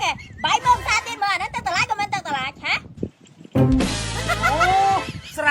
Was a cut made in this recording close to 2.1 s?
no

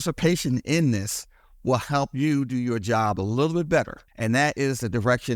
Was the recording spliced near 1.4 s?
no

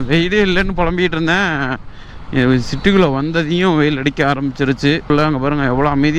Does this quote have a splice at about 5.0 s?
yes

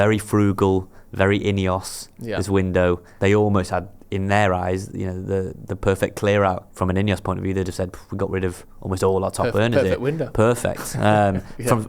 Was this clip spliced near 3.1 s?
yes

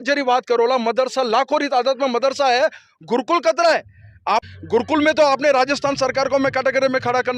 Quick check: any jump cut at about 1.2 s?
no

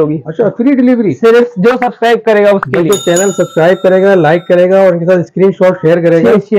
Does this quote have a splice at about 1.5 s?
no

